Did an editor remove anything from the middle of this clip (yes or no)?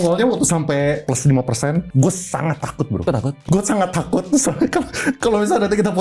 yes